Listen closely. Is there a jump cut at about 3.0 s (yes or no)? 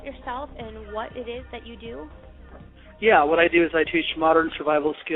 no